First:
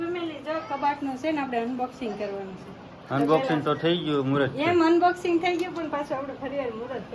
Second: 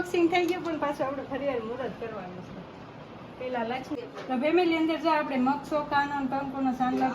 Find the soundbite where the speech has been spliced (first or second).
second